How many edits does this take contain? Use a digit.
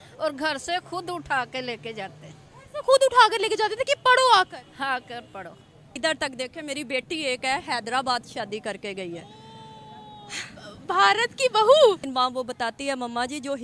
2